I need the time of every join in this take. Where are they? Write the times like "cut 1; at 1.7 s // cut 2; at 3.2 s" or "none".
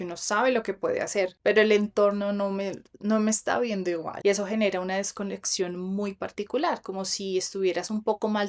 cut 1; at 4.1 s